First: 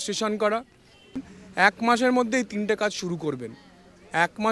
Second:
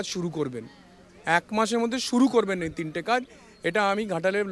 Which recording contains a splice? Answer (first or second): first